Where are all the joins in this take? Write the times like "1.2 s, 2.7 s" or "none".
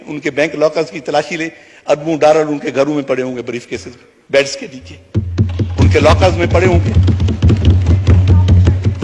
none